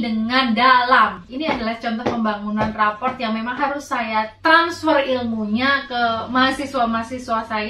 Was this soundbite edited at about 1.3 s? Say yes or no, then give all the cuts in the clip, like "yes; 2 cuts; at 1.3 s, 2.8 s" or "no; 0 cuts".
yes; 1 cut; at 1.3 s